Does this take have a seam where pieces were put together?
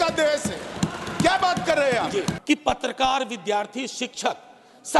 yes; 1 cut; at 2.4 s

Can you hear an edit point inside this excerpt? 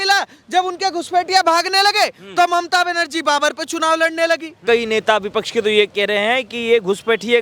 yes; 1 cut; at 4.6 s

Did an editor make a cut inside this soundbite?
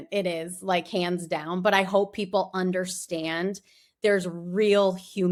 no; 0 cuts

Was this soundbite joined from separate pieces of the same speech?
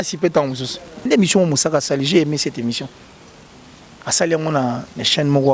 yes; 1 cut; at 1.1 s

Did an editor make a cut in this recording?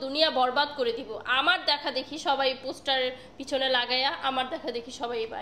no; 0 cuts

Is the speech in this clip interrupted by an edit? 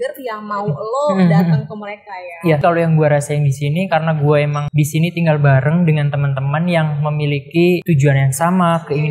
yes; 3 cuts; at 2.6 s, 4.6 s, 7.8 s

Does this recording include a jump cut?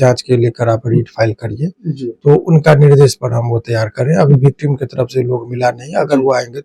no; 0 cuts

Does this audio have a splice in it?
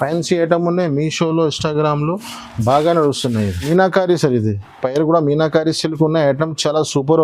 yes; 1 cut; at 3.7 s

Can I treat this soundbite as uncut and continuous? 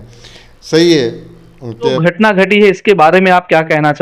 no; 1 cut; at 2.0 s

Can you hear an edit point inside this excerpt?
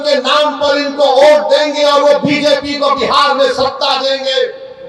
no; 0 cuts

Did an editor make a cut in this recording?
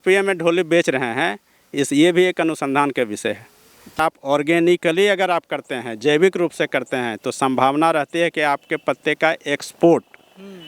yes; 1 cut; at 4.0 s

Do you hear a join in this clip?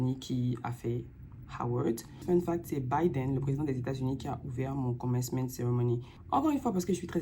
yes; 2 cuts; at 2.1 s, 6.1 s

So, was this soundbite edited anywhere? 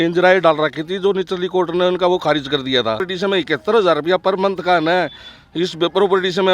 yes; 1 cut; at 3.1 s

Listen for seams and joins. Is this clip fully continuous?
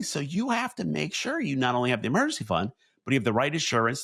yes; 0 cuts

